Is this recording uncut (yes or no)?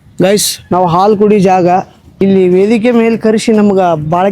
no